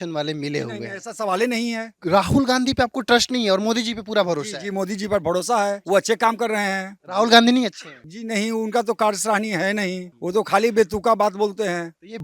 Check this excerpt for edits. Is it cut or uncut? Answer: uncut